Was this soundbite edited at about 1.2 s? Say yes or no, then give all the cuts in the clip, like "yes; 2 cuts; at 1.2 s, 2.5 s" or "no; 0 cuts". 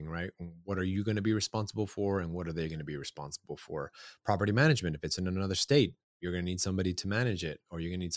no; 0 cuts